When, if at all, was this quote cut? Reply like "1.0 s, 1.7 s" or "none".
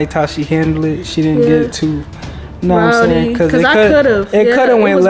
none